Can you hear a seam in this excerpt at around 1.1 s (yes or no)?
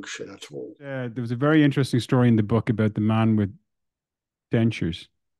yes